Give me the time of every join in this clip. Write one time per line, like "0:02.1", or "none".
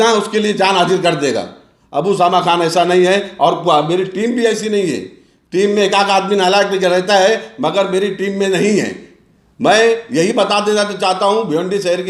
none